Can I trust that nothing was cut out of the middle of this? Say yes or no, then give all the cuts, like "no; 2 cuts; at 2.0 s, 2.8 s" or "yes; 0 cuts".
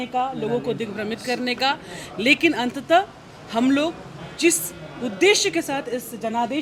yes; 0 cuts